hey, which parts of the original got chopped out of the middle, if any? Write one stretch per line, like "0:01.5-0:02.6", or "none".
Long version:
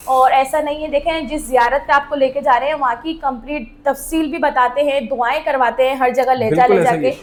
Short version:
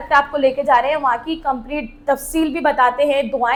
none